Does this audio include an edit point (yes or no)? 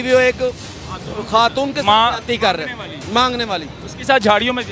no